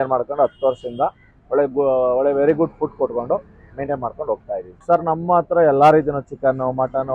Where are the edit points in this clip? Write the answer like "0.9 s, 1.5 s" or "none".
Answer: none